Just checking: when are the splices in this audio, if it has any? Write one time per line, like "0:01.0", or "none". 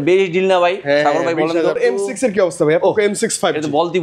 0:01.8

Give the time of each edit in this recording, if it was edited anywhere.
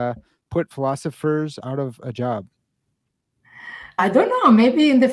0:04.0

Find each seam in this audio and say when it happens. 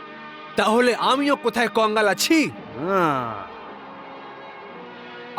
none

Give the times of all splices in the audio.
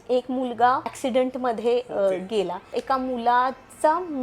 0:01.0
0:02.8

